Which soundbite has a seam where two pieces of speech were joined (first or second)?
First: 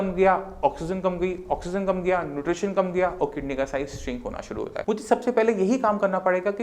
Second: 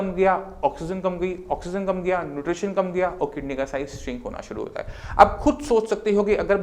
first